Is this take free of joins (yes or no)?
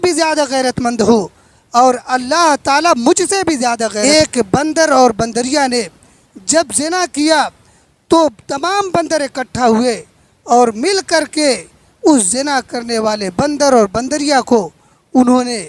no